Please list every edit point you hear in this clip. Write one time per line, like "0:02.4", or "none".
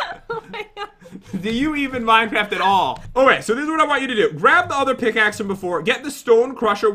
0:03.0